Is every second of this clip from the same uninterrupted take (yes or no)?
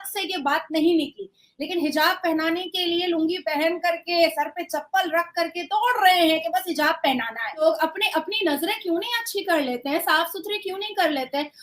no